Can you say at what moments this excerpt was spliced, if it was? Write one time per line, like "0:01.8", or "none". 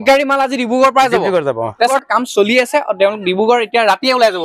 0:01.9